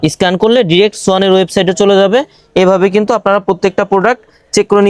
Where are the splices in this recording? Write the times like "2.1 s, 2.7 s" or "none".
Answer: none